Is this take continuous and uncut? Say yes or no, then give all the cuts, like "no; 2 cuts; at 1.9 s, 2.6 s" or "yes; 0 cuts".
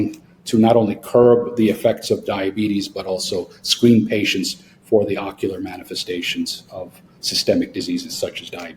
yes; 0 cuts